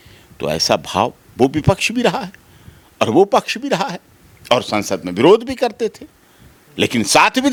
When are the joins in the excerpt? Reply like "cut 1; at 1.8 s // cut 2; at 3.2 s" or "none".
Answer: none